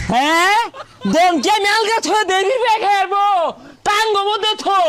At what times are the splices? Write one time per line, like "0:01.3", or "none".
none